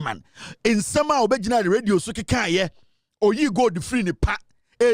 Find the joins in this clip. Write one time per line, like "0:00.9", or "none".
none